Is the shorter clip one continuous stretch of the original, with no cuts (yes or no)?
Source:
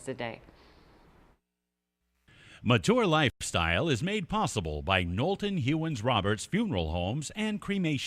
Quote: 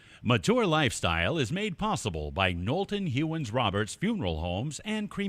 no